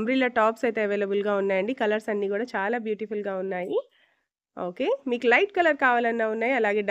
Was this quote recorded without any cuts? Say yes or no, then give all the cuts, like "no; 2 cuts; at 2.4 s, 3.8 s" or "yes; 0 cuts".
yes; 0 cuts